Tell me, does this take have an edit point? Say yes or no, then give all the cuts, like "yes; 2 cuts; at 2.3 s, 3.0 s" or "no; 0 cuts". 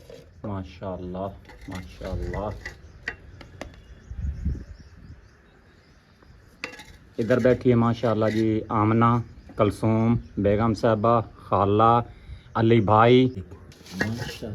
yes; 1 cut; at 13.5 s